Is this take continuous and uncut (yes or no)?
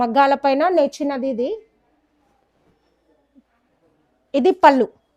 yes